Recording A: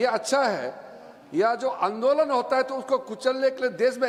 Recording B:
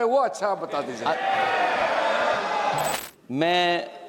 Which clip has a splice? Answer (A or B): B